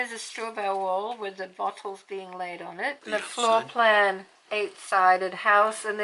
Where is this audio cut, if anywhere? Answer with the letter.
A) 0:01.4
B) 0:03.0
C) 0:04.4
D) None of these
B